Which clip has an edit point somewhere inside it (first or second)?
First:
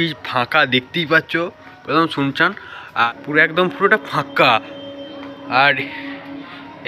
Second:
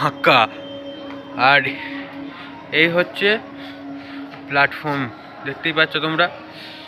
first